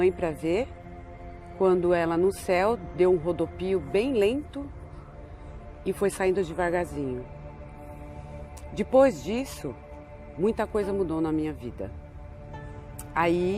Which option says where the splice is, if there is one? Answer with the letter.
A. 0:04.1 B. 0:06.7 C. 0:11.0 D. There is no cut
A